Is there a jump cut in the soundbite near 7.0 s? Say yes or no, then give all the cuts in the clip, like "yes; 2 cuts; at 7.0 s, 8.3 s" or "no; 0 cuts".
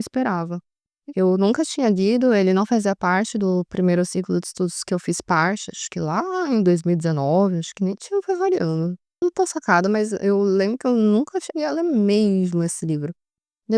no; 1 cut; at 9.2 s